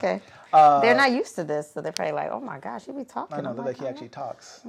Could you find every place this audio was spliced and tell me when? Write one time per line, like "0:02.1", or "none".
none